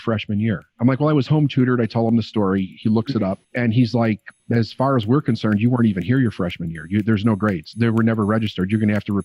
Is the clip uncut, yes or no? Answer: yes